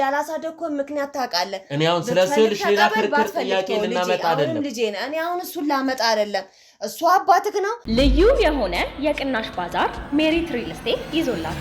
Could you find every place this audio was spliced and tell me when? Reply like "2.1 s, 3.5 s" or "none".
7.8 s